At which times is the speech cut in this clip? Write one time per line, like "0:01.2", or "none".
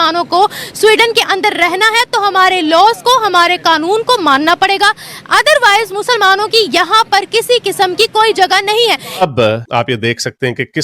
0:09.2

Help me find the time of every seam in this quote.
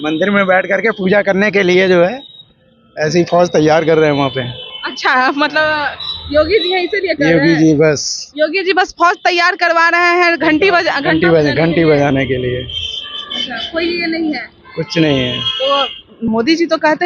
none

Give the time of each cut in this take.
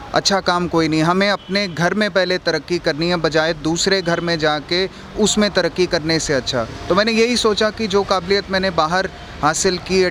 none

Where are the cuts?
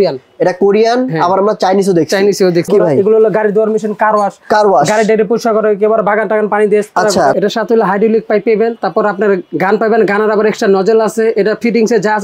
0:02.7
0:07.3

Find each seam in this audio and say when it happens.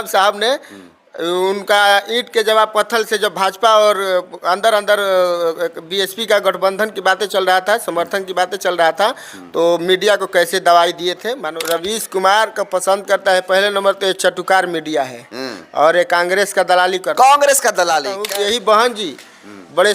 0:11.5
0:18.2

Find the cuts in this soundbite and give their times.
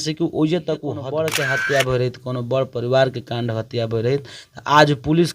0:01.0

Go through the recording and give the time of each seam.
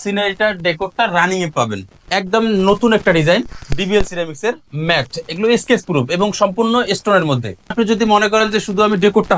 0:01.9
0:07.7

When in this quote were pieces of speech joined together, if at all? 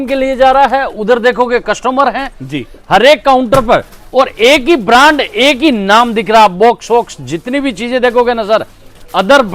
none

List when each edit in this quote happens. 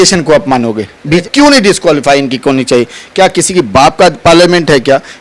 0:01.2

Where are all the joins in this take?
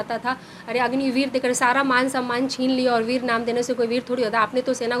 none

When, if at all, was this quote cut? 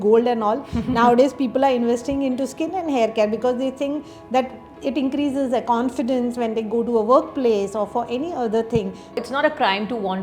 0:09.2

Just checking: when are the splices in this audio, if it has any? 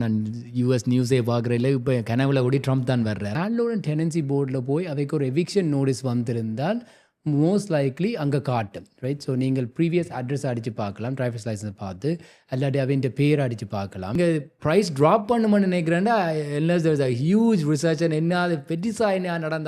0:03.3
0:14.2

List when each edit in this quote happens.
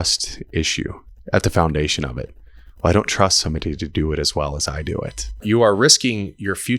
0:05.3

